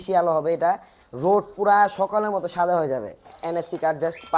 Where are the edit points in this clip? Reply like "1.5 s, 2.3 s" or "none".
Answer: 3.4 s

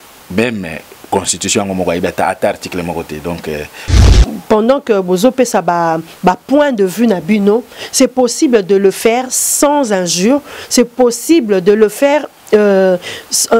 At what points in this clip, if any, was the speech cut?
4.1 s

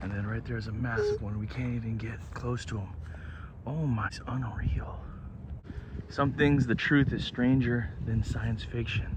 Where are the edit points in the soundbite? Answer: 4.2 s, 5.6 s

